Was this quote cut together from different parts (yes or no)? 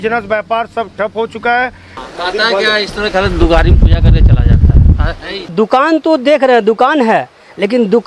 yes